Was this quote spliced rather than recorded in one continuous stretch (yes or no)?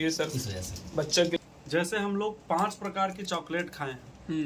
yes